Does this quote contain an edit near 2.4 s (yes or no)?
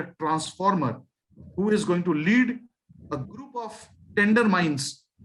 no